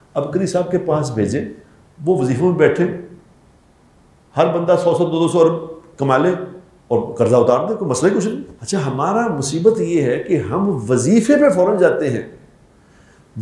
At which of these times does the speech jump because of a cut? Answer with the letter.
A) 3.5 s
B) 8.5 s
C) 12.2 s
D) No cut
B